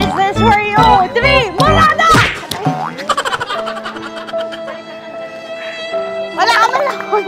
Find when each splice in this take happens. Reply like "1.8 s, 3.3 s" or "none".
none